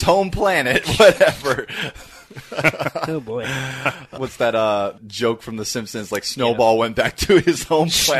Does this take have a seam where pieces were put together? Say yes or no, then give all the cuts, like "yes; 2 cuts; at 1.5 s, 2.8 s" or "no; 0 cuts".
yes; 2 cuts; at 4.1 s, 5.0 s